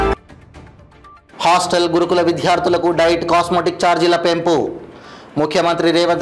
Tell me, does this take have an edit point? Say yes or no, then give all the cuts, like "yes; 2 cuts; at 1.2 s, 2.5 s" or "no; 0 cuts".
no; 0 cuts